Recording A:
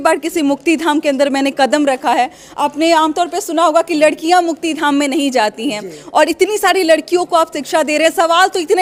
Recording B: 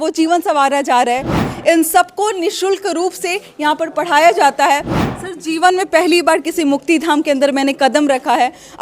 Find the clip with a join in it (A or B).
B